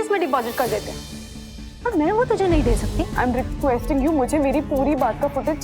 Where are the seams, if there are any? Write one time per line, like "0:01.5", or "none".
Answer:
0:03.0